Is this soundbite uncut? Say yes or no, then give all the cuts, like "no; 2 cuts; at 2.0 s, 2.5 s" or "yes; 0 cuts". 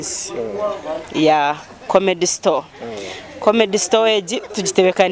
yes; 0 cuts